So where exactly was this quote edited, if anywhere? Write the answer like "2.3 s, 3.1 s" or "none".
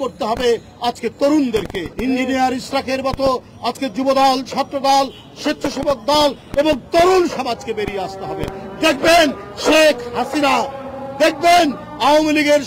1.9 s